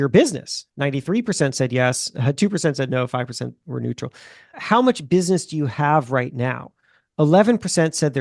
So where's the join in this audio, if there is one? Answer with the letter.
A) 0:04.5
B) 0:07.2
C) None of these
A